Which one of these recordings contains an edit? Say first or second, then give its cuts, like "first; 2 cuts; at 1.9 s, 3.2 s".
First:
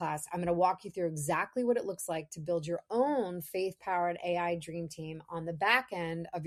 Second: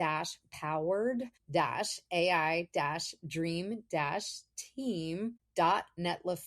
second; 2 cuts; at 1.4 s, 5.4 s